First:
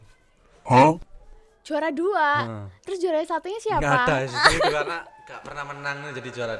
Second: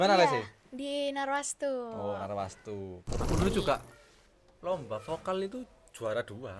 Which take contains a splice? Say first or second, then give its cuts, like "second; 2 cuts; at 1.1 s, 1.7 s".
second; 1 cut; at 3.0 s